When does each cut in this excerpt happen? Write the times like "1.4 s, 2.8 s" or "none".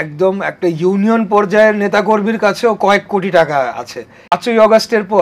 4.3 s